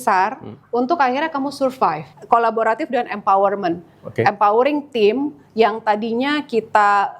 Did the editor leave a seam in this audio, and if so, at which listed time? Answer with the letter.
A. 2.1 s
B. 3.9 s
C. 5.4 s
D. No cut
A